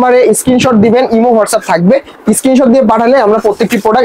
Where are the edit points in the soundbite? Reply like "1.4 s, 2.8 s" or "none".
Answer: none